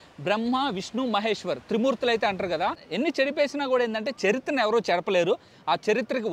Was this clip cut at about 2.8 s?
yes; 1 cut; at 2.8 s

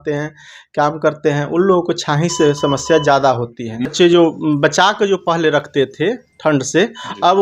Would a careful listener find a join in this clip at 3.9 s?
yes; 1 cut; at 3.9 s

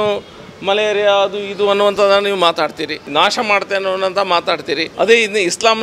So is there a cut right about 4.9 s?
yes; 2 cuts; at 3.1 s, 4.9 s

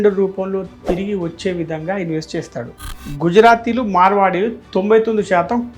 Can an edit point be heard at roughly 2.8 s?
yes; 1 cut; at 2.8 s

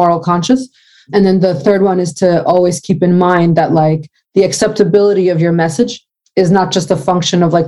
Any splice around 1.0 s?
no; 0 cuts

